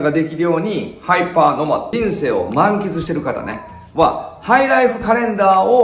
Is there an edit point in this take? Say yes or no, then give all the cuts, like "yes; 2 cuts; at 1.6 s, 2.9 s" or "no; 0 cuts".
yes; 1 cut; at 1.9 s